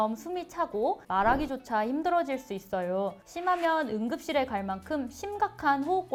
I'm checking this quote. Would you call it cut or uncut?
uncut